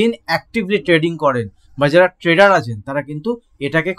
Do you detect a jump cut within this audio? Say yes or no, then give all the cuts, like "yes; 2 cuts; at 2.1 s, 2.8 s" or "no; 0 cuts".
no; 0 cuts